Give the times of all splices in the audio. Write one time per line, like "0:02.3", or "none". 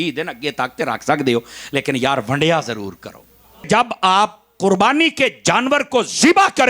0:03.7

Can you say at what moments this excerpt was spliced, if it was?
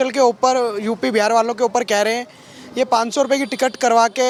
none

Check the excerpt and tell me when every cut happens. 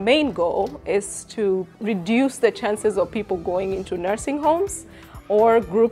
0:01.7

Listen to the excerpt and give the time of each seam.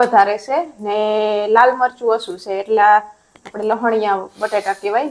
none

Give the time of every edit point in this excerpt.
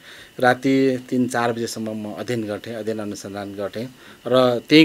none

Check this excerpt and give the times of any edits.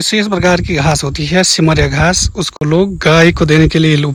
none

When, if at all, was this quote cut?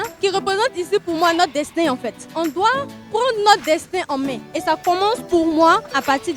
none

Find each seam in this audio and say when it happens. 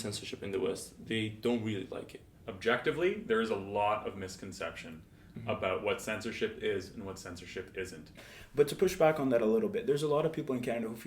0:02.3
0:08.3

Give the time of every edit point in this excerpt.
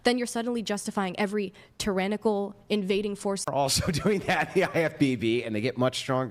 0:03.5

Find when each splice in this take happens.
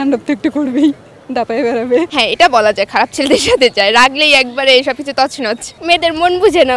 0:02.1
0:05.7

